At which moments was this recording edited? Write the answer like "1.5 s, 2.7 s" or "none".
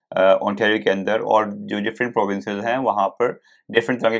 none